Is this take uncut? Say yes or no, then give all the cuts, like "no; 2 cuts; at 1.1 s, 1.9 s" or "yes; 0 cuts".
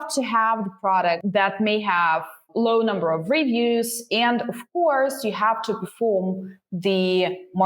no; 2 cuts; at 1.2 s, 2.5 s